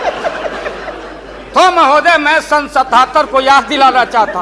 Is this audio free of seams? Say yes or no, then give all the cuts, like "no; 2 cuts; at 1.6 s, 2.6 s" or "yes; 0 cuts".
yes; 0 cuts